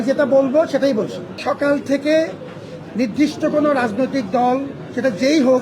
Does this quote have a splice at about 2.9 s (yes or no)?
no